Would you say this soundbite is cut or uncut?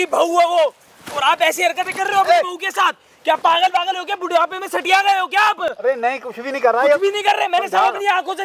uncut